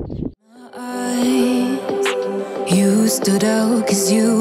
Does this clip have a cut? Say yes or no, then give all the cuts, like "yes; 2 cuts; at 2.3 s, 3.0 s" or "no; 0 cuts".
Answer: yes; 1 cut; at 0.9 s